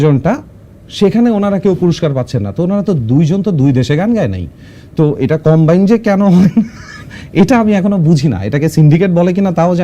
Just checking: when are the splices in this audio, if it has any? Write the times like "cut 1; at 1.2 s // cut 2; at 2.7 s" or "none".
none